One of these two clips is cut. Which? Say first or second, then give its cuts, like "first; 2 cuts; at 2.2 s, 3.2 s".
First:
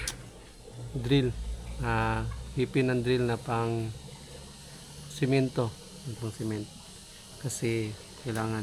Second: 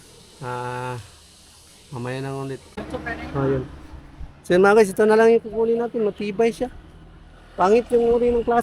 second; 1 cut; at 2.7 s